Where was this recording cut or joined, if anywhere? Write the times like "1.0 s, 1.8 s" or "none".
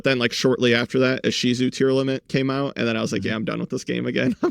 none